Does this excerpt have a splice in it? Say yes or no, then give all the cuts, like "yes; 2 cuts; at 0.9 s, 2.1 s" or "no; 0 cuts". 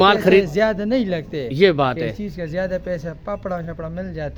no; 0 cuts